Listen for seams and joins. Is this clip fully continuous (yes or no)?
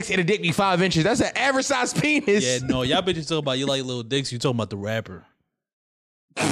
yes